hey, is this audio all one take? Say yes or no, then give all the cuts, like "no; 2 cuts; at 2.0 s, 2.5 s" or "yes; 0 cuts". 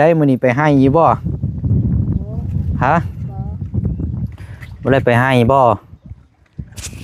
yes; 0 cuts